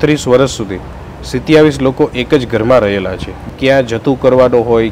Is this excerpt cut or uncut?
cut